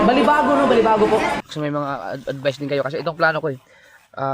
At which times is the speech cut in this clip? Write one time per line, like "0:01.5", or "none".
0:01.4